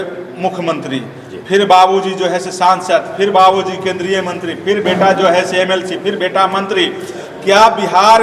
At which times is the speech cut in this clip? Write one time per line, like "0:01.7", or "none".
none